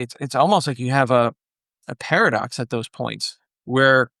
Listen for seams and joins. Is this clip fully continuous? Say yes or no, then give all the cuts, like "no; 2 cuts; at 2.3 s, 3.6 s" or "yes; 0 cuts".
yes; 0 cuts